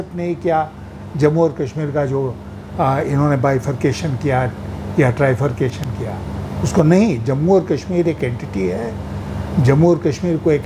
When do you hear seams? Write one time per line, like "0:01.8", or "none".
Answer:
none